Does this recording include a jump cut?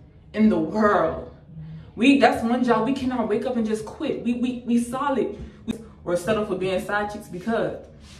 yes; 1 cut; at 5.7 s

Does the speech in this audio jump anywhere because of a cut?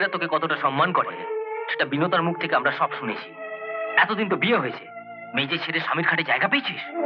no; 0 cuts

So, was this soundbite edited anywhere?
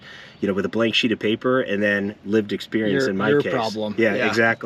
no; 0 cuts

